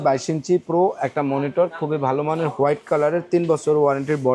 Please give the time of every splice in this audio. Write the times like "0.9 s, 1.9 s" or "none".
none